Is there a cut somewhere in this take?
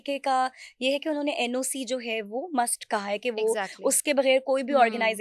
no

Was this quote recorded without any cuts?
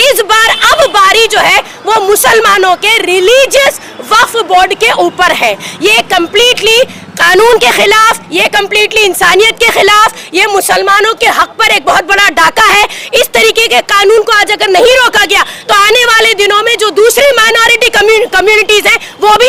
yes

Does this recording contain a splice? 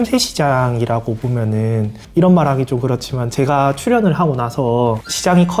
no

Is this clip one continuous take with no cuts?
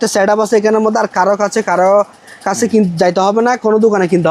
yes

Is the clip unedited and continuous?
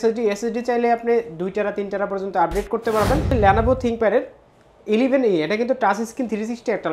no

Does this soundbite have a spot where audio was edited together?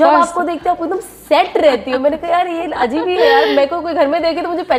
no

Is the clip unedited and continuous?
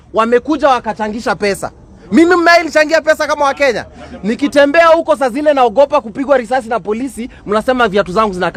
yes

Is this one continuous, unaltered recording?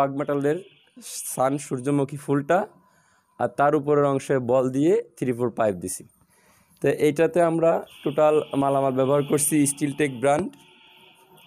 yes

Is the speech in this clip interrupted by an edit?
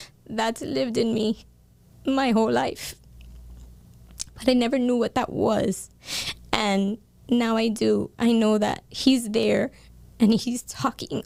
no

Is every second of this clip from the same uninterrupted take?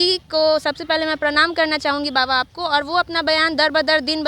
yes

